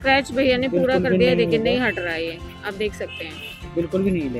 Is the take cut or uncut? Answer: uncut